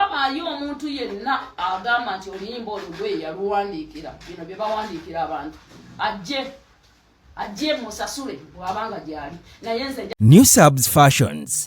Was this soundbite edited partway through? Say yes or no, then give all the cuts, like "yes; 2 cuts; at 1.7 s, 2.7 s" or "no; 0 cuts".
yes; 1 cut; at 10.2 s